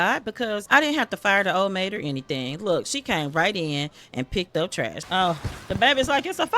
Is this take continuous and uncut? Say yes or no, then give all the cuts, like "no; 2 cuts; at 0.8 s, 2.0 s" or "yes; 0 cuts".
no; 1 cut; at 5.0 s